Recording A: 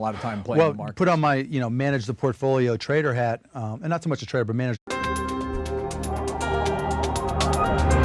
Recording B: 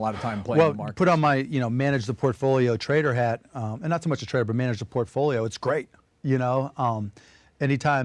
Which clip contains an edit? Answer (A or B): B